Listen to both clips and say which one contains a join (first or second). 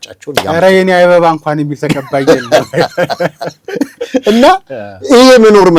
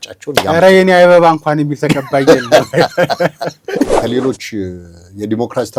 second